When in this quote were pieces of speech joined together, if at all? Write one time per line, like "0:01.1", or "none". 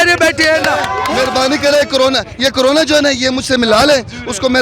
0:01.0

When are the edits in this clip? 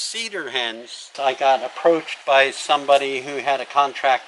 0:01.1
0:02.1

